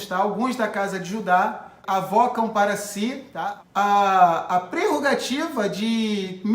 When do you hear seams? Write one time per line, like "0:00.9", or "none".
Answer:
0:01.8
0:03.3